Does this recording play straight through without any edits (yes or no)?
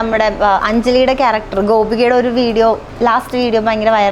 no